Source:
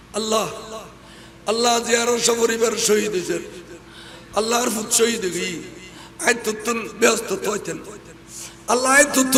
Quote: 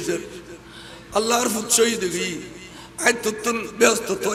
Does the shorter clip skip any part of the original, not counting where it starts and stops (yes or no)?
no